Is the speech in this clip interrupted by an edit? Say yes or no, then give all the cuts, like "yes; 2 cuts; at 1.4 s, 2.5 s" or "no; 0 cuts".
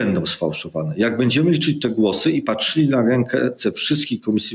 no; 0 cuts